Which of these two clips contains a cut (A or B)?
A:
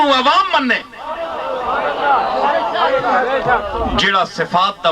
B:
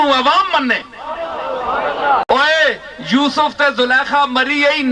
B